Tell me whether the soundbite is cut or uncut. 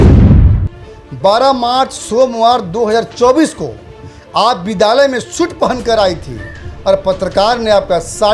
cut